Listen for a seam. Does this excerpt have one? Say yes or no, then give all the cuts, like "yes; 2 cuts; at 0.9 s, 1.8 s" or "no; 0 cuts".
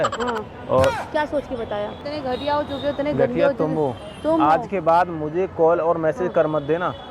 yes; 1 cut; at 2.0 s